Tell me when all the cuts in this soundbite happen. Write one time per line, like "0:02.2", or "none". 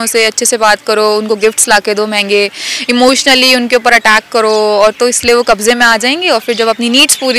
none

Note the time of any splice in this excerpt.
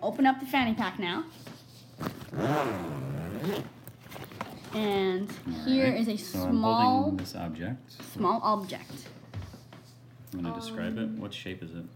0:02.7

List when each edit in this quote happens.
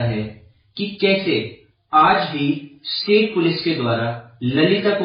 none

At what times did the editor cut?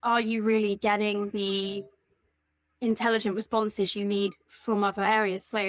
none

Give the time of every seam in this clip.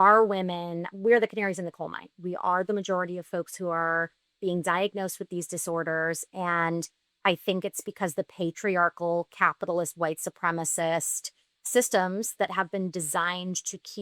0:00.9
0:02.2

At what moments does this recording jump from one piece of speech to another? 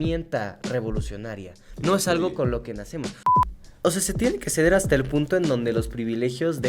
0:03.1

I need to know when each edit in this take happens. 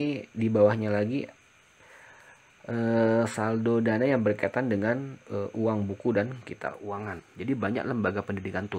0:06.8

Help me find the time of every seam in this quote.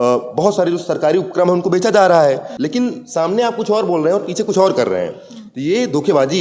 0:02.5

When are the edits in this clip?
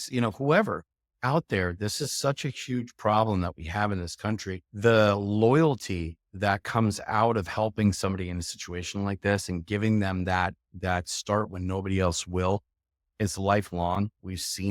0:04.6

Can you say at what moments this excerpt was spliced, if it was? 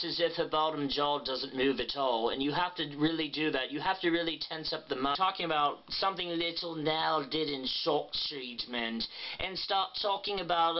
none

